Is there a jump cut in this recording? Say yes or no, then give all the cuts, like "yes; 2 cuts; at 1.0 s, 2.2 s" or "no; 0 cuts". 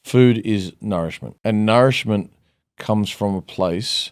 yes; 1 cut; at 1.2 s